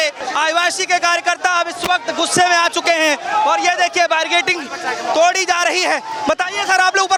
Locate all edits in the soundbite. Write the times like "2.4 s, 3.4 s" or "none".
none

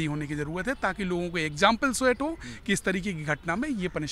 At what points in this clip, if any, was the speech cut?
none

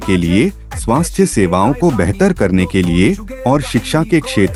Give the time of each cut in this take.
none

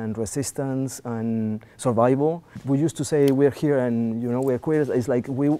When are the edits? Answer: 2.5 s

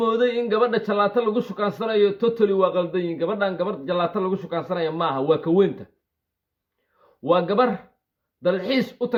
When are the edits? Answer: none

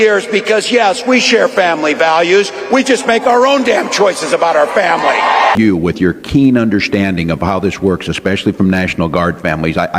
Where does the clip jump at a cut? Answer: 5.5 s

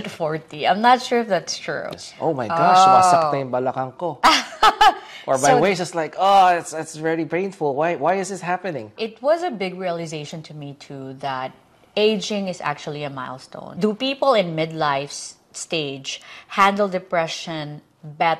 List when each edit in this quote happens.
1.7 s, 8.9 s, 13.7 s

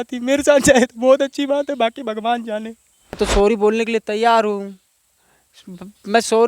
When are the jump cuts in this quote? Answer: 3.2 s

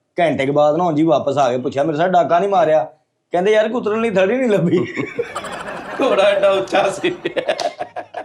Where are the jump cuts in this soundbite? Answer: none

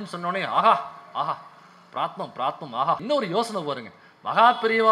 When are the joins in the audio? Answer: 3.0 s

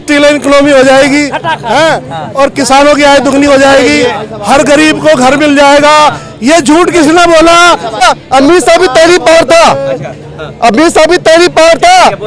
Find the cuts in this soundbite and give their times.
8.0 s

